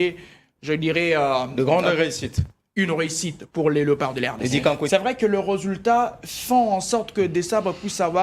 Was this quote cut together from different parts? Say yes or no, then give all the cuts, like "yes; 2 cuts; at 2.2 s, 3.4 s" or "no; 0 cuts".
yes; 1 cut; at 4.9 s